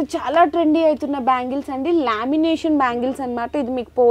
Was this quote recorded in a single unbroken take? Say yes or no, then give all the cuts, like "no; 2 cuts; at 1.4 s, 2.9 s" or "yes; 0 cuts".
yes; 0 cuts